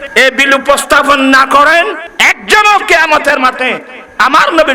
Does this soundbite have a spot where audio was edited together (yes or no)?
no